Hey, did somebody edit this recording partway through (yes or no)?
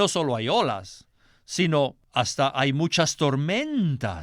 yes